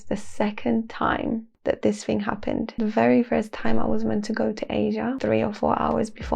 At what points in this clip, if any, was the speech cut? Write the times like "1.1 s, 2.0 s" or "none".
1.5 s, 2.7 s, 5.2 s